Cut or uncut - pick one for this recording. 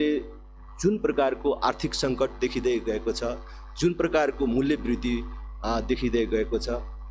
uncut